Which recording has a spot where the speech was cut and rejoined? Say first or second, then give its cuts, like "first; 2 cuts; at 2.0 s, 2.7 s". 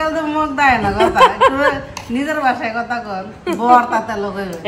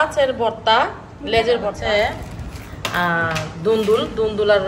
second; 1 cut; at 1.8 s